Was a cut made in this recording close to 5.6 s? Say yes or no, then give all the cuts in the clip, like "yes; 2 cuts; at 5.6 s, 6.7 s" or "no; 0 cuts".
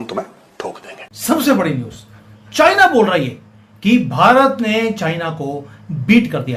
no; 1 cut; at 1.1 s